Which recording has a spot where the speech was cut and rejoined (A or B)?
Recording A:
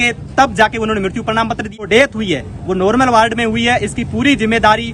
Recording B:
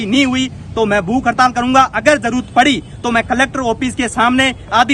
A